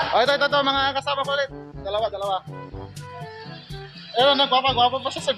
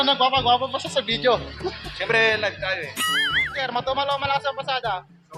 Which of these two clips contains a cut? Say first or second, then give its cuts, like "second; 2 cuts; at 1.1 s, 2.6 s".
second; 1 cut; at 3.6 s